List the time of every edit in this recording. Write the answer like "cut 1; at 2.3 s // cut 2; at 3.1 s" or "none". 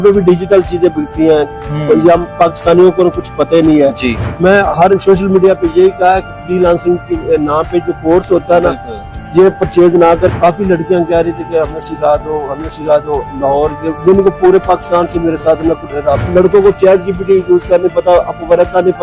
cut 1; at 4.2 s // cut 2; at 10.3 s // cut 3; at 16.2 s